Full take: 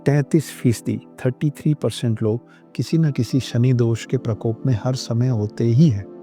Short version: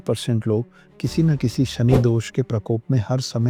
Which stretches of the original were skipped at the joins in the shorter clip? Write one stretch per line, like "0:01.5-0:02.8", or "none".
none